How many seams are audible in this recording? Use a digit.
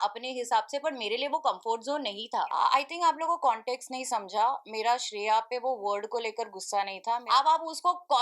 2